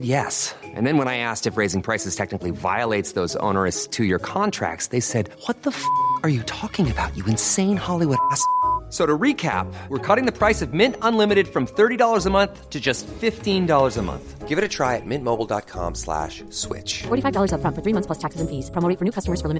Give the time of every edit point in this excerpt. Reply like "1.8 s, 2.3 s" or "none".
none